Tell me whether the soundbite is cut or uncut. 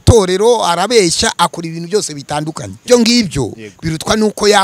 cut